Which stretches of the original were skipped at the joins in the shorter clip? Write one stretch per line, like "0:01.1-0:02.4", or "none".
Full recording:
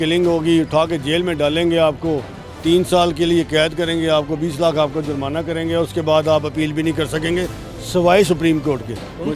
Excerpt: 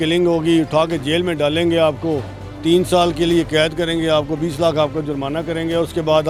none